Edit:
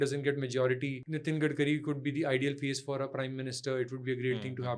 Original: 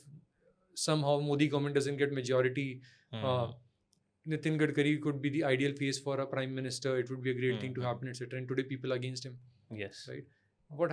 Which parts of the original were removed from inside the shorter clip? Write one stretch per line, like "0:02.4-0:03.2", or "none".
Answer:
0:02.8-0:04.2